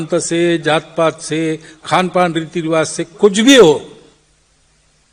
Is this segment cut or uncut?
uncut